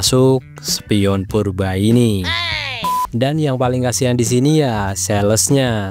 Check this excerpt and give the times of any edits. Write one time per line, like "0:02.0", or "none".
0:02.9

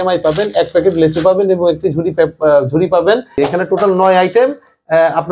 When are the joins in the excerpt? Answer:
0:03.4

